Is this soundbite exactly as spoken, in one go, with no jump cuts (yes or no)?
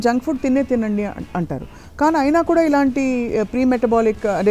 yes